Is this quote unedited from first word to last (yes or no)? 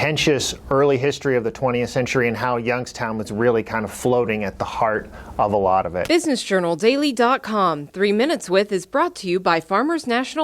no